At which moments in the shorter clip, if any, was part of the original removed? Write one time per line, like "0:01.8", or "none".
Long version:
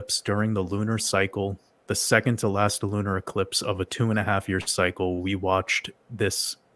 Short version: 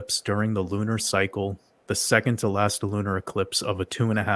none